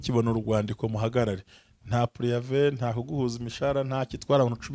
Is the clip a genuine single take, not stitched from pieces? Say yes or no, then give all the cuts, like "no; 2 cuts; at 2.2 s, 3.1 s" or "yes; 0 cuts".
yes; 0 cuts